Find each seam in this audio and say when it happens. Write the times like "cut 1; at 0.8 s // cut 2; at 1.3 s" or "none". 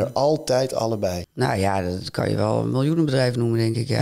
cut 1; at 1.2 s